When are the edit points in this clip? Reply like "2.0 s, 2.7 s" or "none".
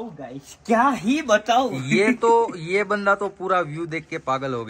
none